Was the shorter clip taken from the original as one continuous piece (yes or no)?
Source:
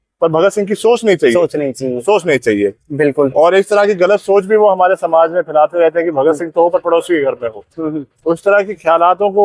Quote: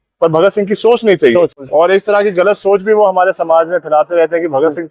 no